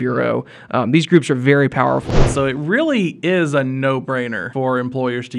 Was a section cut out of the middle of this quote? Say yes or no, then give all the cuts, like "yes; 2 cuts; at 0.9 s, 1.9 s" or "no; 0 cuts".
yes; 2 cuts; at 2.1 s, 4.4 s